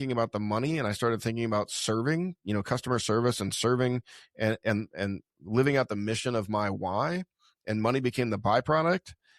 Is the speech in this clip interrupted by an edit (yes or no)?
no